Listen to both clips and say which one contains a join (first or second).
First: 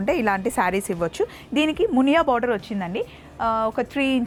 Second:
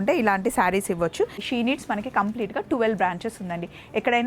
second